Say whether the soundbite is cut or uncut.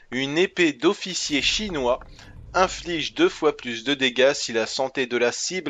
cut